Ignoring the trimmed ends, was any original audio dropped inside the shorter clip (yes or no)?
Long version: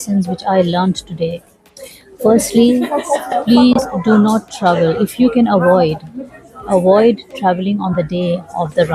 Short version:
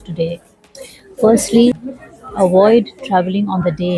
yes